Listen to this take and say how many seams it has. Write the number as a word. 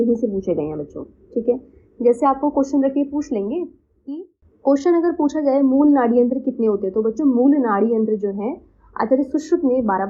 one